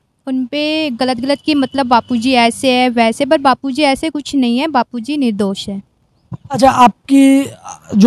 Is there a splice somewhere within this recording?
no; 0 cuts

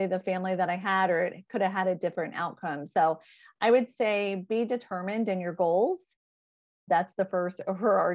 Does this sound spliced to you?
no; 0 cuts

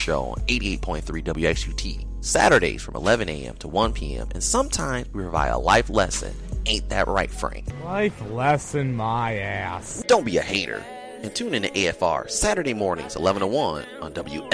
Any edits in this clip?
no; 0 cuts

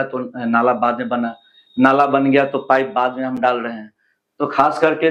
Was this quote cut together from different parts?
no; 0 cuts

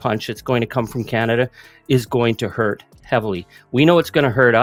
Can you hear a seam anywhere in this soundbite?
no; 0 cuts

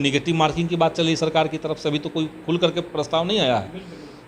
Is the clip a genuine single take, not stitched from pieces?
yes; 0 cuts

